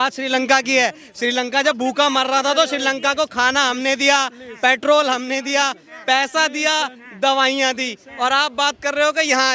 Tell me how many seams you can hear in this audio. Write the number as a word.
zero